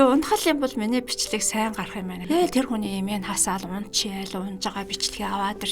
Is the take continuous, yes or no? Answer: no